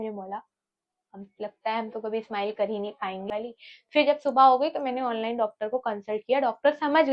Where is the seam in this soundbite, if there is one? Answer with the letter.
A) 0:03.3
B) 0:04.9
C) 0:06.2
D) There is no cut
A